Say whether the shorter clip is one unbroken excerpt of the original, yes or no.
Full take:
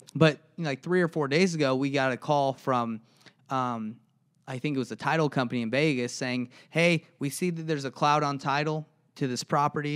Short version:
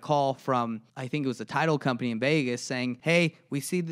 no